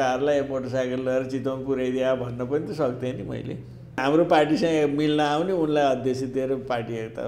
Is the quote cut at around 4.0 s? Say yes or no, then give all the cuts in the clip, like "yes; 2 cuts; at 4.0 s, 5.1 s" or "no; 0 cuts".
yes; 1 cut; at 4.0 s